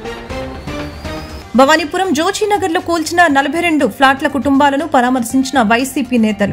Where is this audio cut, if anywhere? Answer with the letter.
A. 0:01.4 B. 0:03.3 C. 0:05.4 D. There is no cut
A